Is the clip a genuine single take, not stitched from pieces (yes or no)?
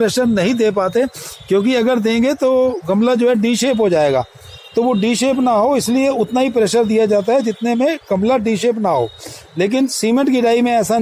yes